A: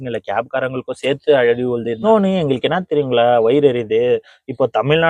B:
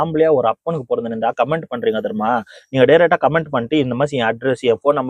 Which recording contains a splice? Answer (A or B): A